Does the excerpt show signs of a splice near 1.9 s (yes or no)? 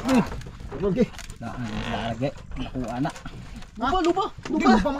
no